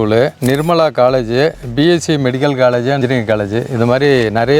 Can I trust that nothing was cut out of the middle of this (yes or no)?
yes